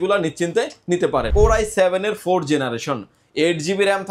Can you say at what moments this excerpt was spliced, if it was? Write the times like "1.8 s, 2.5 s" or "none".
1.3 s